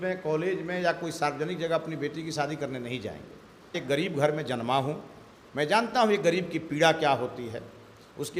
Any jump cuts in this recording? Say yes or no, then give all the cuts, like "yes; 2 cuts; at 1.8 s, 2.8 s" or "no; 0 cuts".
yes; 1 cut; at 3.8 s